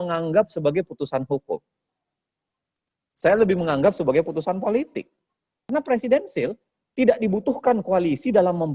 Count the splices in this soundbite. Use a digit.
1